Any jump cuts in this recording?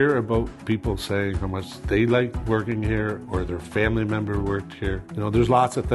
yes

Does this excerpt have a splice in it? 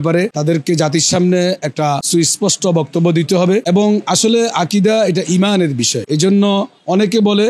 no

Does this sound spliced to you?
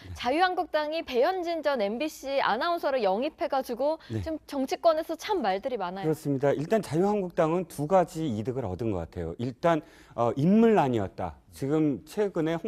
no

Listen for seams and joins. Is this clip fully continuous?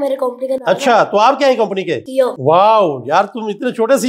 no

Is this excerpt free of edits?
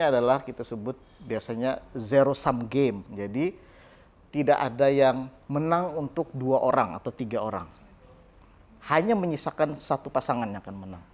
yes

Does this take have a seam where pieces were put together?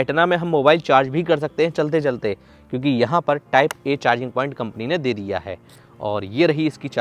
no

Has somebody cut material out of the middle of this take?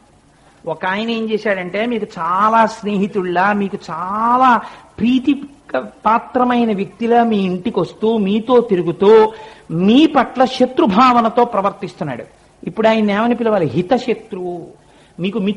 no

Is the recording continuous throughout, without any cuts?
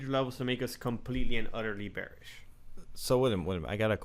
yes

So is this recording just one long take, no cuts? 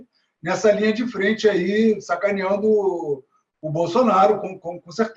yes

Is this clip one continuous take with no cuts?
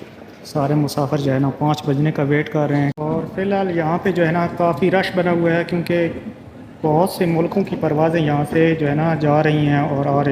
no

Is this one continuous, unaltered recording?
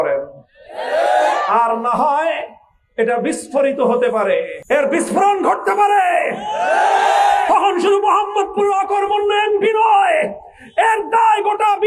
no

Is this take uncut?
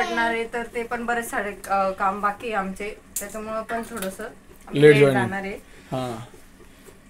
yes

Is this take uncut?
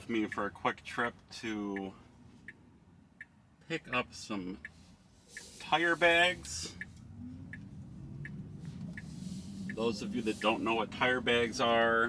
yes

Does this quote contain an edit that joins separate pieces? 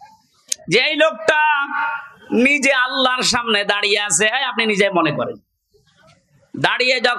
no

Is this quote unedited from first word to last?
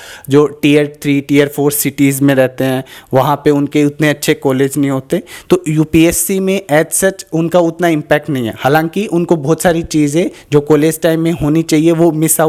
yes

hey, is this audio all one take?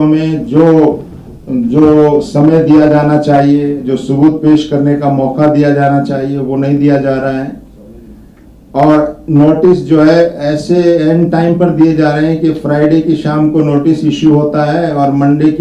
yes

